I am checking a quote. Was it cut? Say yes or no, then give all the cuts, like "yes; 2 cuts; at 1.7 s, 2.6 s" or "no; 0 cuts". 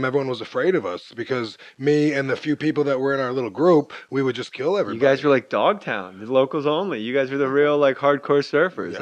yes; 1 cut; at 5.5 s